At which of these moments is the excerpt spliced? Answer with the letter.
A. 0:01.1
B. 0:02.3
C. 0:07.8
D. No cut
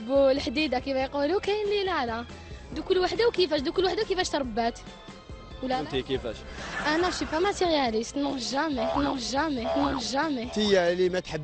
B